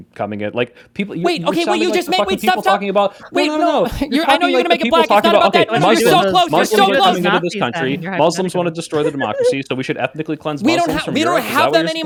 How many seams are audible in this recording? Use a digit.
0